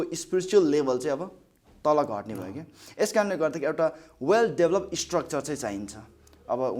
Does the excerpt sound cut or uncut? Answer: uncut